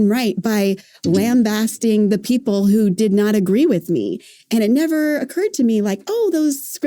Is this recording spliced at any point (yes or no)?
no